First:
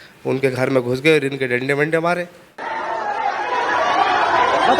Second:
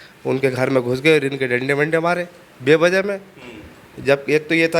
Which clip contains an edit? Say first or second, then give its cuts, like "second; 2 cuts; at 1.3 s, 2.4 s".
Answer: first; 1 cut; at 2.5 s